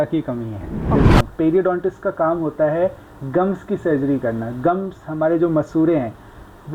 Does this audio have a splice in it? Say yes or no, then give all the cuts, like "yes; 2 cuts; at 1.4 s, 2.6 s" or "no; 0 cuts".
yes; 1 cut; at 0.9 s